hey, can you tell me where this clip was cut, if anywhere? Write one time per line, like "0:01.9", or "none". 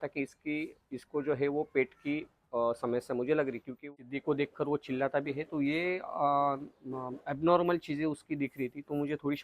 0:03.9